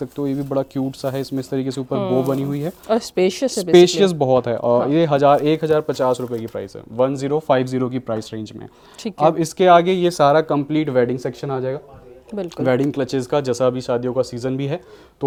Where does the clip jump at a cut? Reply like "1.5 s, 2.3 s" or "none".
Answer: none